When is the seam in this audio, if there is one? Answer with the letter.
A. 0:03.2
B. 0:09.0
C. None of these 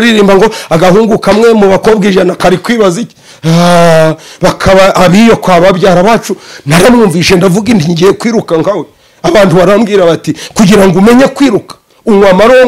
A